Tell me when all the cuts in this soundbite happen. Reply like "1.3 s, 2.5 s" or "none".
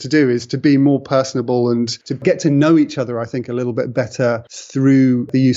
2.2 s, 4.6 s